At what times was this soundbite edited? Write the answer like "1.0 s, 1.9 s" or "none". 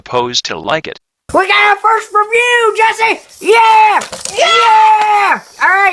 0.9 s